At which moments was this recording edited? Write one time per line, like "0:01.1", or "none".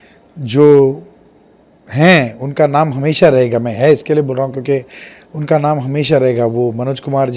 none